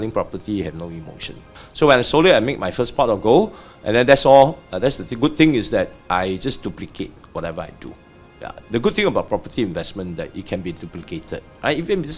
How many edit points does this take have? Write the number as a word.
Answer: one